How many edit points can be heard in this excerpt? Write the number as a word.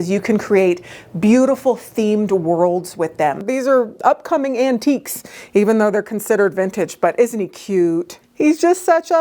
two